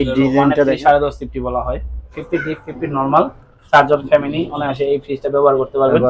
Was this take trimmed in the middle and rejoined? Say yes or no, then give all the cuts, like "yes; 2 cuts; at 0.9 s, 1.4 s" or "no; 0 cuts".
yes; 1 cut; at 2.2 s